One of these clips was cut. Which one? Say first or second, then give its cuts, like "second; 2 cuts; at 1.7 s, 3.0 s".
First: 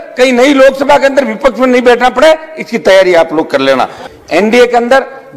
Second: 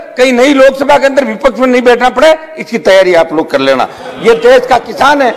first; 1 cut; at 4.0 s